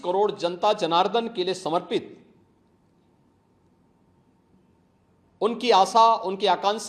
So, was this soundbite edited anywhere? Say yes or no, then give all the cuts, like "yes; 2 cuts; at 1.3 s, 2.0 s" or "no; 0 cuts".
no; 0 cuts